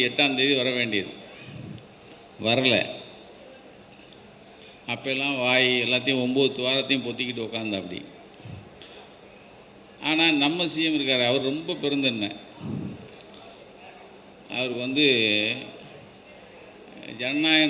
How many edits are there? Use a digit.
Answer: 0